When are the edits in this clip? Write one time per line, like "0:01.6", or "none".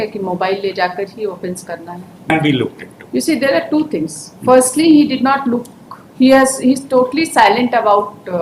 0:02.3